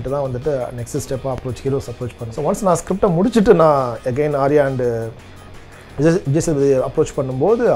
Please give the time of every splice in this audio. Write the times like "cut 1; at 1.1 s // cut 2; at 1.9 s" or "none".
cut 1; at 2.2 s

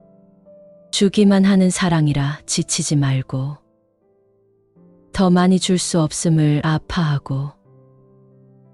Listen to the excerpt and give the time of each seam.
cut 1; at 0.9 s

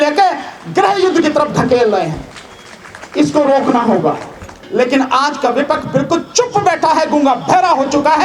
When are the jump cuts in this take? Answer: cut 1; at 4.6 s

